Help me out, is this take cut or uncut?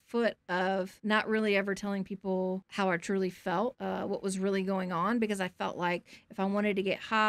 cut